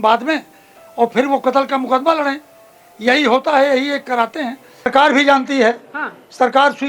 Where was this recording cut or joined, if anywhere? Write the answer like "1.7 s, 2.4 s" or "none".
4.9 s